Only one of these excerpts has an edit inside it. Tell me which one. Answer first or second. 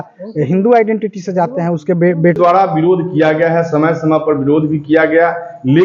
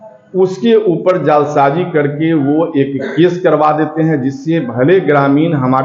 first